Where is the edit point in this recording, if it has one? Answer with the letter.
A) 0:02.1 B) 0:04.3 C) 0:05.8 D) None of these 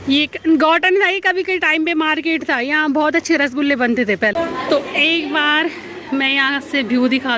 B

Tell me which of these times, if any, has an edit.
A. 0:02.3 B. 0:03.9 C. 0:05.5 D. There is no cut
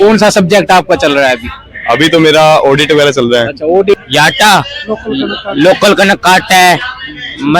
B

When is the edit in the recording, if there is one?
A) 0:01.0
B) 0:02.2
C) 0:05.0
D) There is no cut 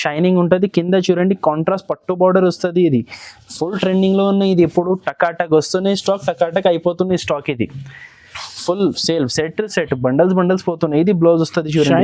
D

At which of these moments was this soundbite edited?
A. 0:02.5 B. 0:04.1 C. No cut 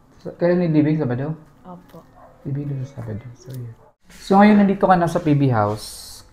B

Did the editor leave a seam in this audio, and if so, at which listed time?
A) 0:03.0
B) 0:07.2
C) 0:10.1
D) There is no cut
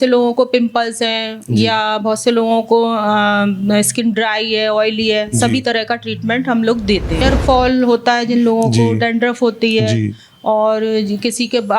B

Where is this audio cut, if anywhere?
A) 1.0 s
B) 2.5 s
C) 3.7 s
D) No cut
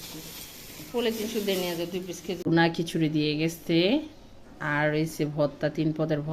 B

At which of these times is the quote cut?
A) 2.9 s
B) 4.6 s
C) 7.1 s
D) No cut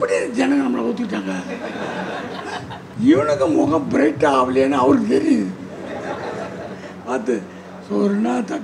A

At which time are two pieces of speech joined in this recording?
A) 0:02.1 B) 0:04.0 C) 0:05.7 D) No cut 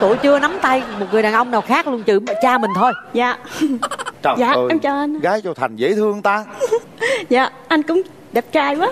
B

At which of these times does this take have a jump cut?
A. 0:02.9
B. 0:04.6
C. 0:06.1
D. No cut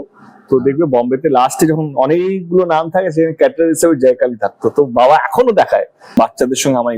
C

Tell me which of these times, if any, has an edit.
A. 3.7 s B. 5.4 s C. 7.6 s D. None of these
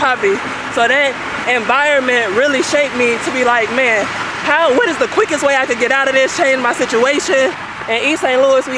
C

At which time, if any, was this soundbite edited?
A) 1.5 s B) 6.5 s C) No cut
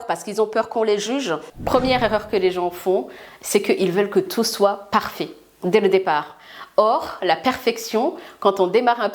A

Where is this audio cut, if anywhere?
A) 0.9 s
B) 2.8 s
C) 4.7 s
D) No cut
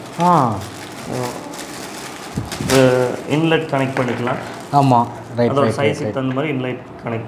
D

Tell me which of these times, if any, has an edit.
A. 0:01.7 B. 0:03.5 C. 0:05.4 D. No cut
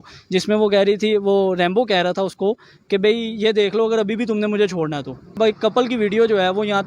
C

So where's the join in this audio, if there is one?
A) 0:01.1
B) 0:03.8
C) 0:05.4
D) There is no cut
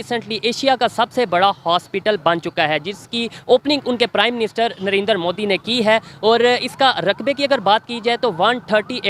D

